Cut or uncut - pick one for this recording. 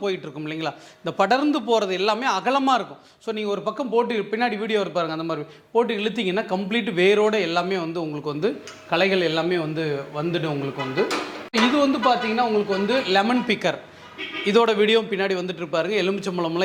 uncut